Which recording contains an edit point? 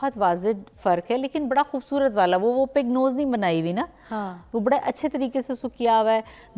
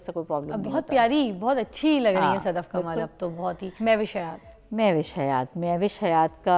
second; 1 cut; at 3.7 s

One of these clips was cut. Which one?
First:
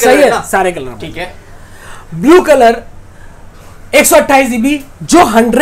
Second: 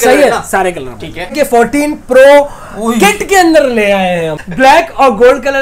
second; 2 cuts; at 1.3 s, 4.4 s

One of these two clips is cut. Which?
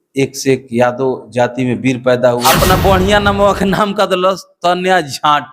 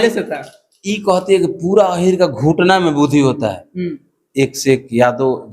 first; 1 cut; at 2.4 s

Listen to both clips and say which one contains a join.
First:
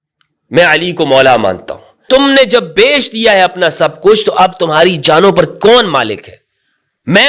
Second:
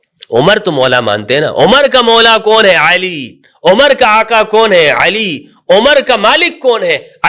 first; 1 cut; at 2.0 s

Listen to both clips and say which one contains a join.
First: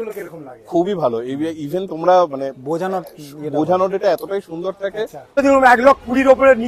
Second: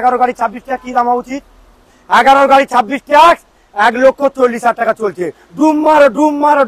first; 1 cut; at 5.4 s

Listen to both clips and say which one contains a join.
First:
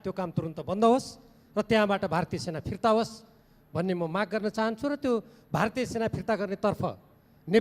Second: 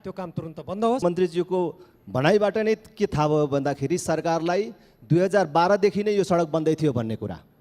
second; 1 cut; at 1.0 s

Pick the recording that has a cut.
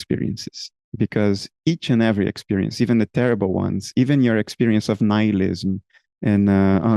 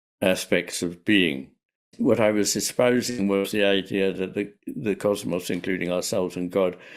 second; 1 cut; at 1.9 s

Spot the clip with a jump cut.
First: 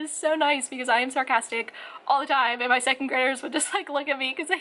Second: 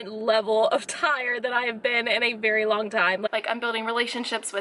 second; 1 cut; at 3.3 s

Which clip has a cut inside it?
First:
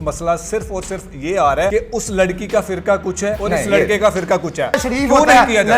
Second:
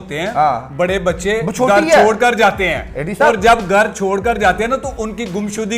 first; 3 cuts; at 1.7 s, 3.4 s, 4.8 s

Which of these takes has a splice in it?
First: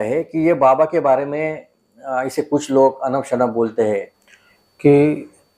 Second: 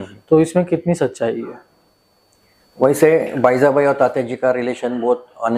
first; 1 cut; at 4.2 s

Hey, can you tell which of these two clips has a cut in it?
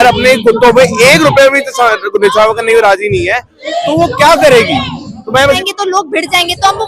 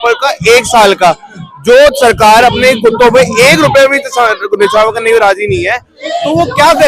first; 1 cut; at 5.6 s

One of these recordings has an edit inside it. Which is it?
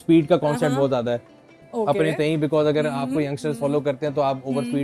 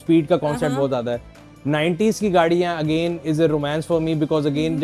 first; 1 cut; at 1.5 s

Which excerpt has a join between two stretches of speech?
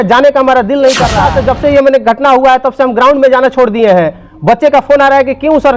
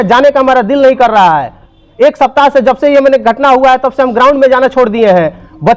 first; 1 cut; at 1.2 s

